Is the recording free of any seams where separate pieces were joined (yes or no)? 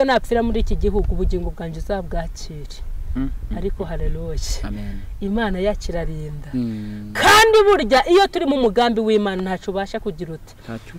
yes